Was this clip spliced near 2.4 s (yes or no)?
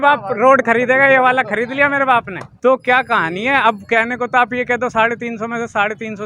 yes